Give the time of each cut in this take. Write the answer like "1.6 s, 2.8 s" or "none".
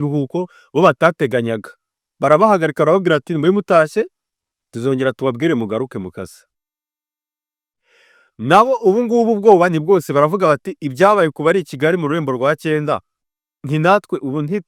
none